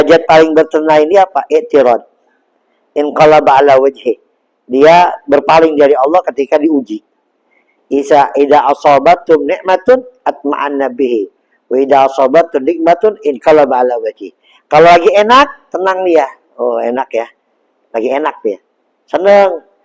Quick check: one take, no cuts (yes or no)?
yes